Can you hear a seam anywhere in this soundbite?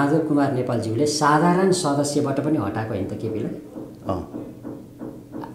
no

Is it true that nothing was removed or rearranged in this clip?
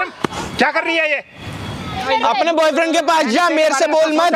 no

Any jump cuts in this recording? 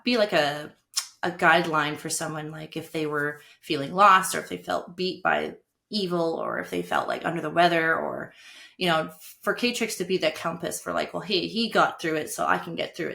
no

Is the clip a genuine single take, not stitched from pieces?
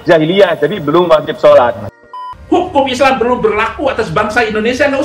no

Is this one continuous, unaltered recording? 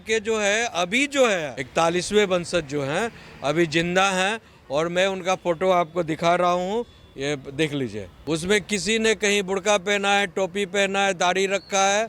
no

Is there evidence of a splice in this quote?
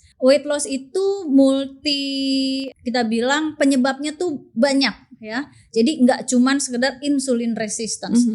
yes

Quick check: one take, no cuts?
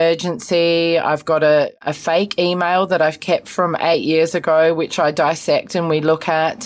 no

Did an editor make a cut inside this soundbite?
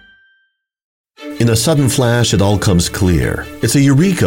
yes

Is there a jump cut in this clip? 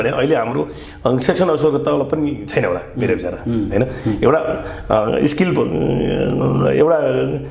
no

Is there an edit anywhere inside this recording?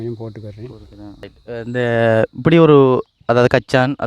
yes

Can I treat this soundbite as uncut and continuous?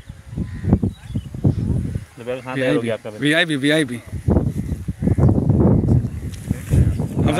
yes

